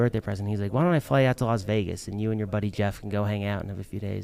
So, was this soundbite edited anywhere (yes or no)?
no